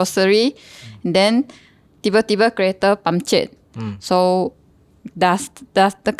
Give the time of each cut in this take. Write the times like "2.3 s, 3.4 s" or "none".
none